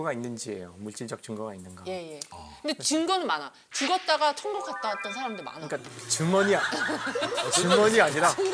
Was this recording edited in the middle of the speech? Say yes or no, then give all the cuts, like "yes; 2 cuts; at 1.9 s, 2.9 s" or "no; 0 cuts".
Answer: no; 0 cuts